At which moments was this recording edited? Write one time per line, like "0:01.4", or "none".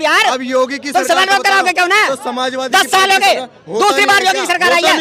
none

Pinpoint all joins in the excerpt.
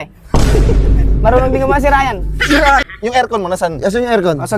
0:02.8

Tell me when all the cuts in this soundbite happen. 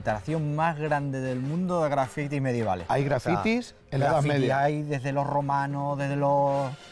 0:02.8

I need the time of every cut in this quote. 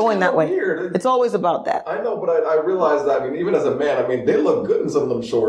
none

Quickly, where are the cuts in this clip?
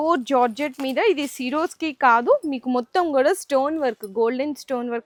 none

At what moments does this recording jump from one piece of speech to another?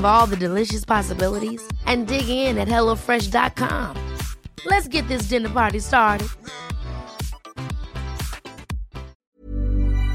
0:09.2

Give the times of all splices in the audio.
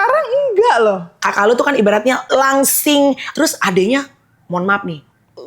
0:01.2
0:02.2
0:03.3

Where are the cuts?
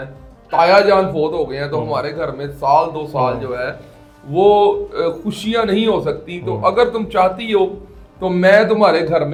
none

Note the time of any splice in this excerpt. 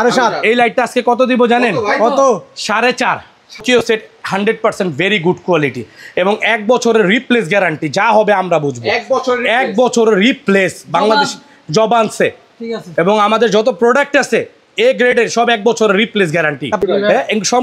0:03.6
0:16.7

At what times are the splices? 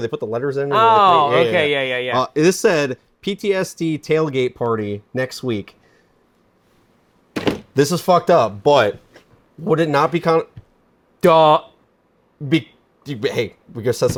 none

